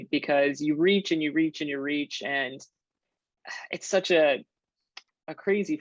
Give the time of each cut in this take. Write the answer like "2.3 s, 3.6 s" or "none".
none